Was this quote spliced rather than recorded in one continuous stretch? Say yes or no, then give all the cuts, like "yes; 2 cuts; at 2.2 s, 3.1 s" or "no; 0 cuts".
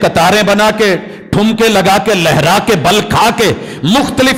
no; 0 cuts